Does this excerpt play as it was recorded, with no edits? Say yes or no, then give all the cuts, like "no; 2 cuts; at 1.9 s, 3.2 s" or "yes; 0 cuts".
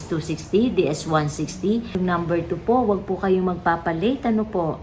no; 1 cut; at 1.9 s